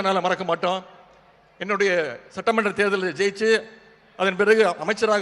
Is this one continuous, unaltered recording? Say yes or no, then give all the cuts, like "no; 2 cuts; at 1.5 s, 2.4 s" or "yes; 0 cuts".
yes; 0 cuts